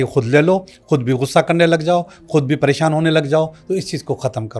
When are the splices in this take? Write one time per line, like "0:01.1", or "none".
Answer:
none

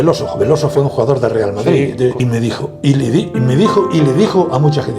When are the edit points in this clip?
0:02.2

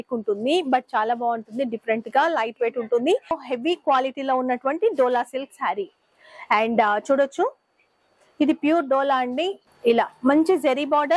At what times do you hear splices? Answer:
0:03.4
0:09.6

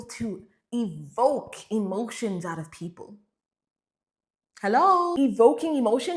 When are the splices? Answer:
0:05.1

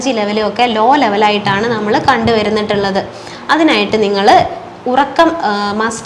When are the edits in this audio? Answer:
none

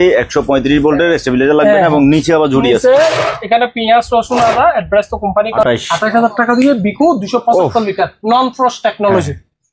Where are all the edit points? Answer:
0:05.6

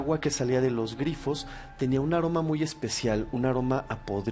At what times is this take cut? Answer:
none

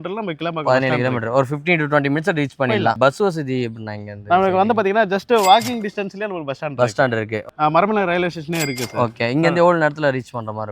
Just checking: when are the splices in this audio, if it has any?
0:03.0
0:07.4

